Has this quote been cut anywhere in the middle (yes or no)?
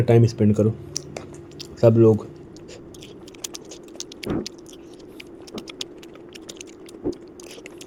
no